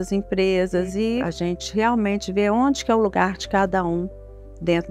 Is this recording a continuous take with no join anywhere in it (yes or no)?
no